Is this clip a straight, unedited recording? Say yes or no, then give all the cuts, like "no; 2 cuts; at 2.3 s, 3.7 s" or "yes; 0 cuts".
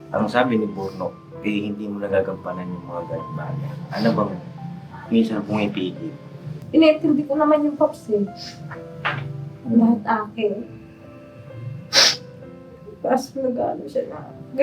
no; 1 cut; at 6.6 s